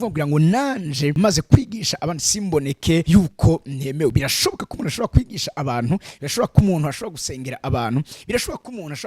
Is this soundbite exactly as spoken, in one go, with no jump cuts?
no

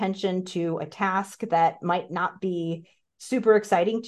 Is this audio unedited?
yes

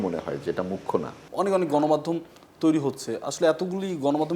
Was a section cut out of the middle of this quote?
yes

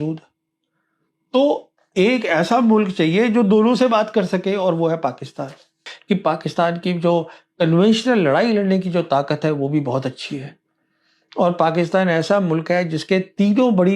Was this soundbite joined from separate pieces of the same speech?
yes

